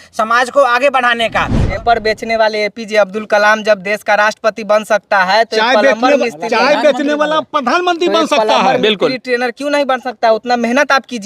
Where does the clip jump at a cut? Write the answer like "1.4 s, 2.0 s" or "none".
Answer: 1.6 s